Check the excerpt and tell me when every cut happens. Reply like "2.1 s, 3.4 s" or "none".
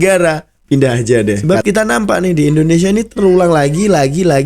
1.4 s